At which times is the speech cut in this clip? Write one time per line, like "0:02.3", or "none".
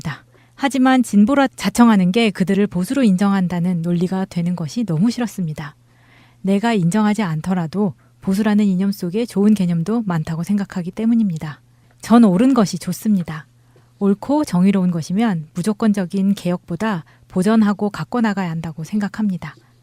none